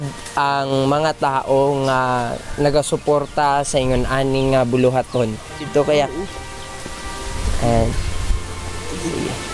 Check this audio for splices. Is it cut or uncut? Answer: cut